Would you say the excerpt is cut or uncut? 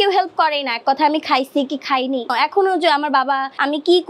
uncut